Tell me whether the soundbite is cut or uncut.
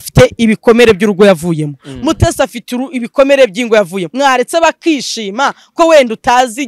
cut